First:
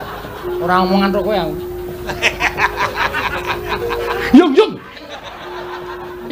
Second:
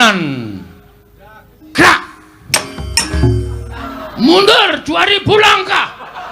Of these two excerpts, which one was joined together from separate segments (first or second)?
second